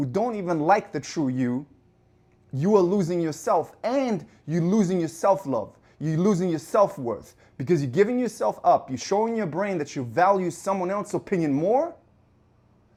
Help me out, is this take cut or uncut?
uncut